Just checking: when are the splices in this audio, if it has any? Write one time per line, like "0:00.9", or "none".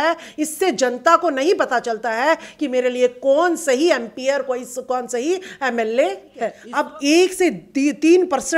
0:06.6